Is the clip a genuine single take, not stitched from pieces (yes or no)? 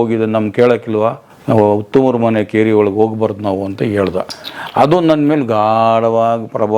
no